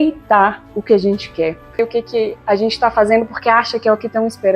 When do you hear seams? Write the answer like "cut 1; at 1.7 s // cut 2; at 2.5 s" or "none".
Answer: cut 1; at 1.9 s